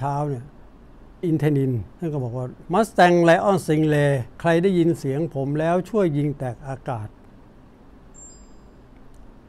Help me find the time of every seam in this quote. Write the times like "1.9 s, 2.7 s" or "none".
0.9 s, 2.1 s, 4.2 s

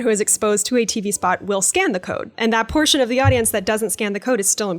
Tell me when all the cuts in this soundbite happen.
2.3 s

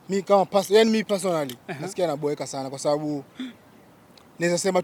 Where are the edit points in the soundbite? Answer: none

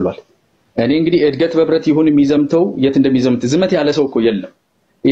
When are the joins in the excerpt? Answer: none

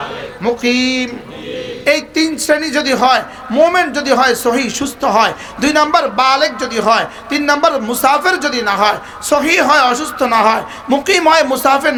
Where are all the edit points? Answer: none

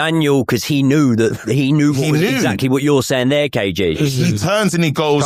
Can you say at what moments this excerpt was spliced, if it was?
none

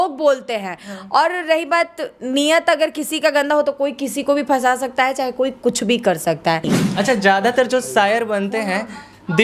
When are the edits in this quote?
6.8 s

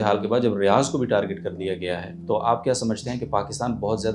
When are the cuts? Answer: 2.1 s

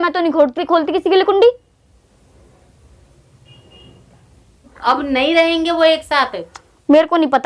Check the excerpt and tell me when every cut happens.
4.7 s

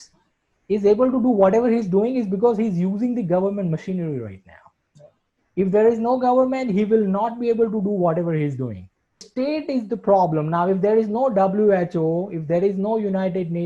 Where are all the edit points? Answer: 9.2 s

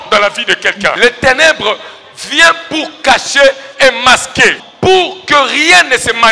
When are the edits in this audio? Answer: 0.9 s, 4.7 s

